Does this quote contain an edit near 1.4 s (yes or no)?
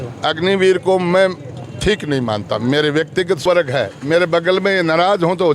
no